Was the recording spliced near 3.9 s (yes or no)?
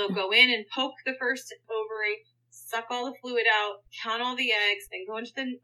no